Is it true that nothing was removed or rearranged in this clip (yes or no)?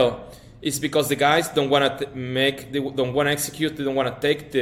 yes